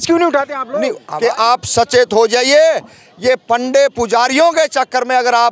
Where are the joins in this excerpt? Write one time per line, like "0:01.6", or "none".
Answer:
0:01.0

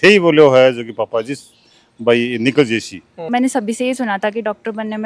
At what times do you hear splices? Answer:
0:03.3

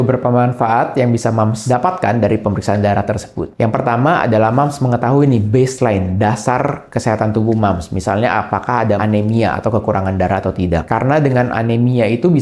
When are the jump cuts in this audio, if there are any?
0:01.6
0:09.0
0:10.9

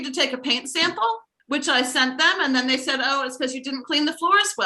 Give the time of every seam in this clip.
0:01.3

